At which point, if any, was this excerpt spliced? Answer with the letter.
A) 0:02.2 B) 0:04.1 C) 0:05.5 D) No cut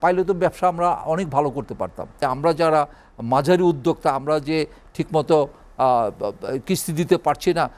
A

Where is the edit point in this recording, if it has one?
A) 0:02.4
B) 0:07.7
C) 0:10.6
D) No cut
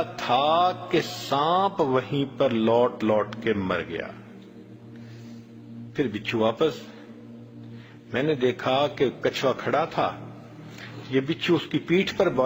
D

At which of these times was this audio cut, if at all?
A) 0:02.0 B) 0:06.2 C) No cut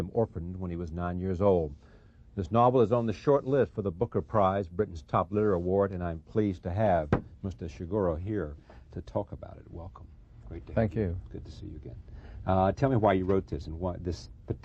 B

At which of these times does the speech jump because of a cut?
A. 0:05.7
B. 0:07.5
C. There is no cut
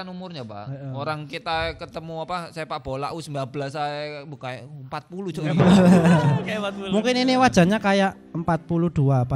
C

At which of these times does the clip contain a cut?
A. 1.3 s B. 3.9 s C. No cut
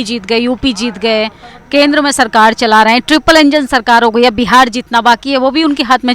C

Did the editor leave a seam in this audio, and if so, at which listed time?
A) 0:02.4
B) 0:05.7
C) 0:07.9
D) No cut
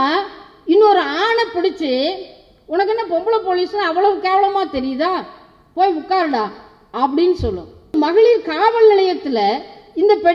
C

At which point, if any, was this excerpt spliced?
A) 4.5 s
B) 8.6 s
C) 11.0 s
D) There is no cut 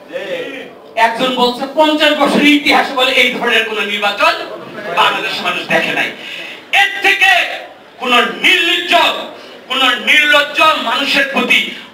D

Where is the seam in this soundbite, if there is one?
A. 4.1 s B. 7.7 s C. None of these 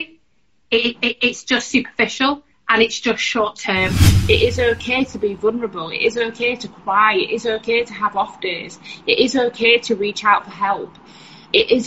A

